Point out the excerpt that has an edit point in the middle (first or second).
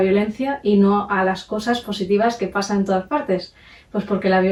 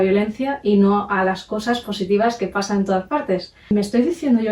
second